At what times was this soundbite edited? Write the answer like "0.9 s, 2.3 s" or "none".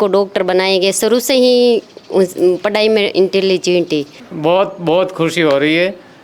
4.2 s